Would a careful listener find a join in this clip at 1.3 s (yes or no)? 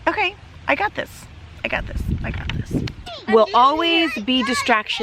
no